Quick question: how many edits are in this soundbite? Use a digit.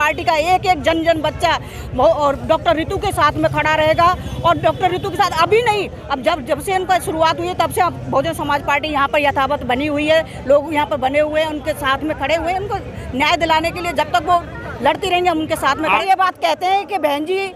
1